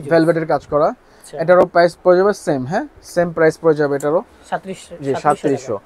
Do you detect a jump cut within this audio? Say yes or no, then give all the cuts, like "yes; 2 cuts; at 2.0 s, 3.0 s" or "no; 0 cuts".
no; 0 cuts